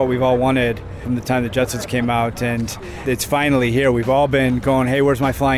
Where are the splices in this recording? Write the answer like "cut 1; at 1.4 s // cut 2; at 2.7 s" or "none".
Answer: cut 1; at 0.9 s // cut 2; at 3.0 s